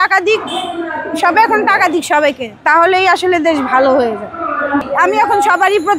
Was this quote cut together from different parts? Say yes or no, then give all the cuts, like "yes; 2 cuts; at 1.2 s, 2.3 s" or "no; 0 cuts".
yes; 1 cut; at 4.9 s